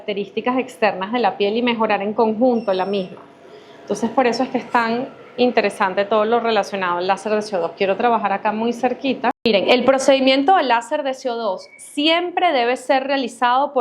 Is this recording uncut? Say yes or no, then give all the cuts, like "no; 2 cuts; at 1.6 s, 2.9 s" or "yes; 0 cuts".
no; 1 cut; at 9.4 s